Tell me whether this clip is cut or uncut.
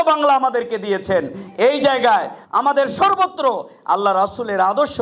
cut